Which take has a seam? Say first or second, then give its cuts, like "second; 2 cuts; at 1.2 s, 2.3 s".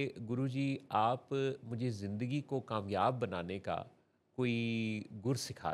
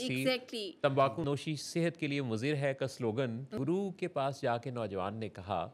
second; 2 cuts; at 1.2 s, 3.4 s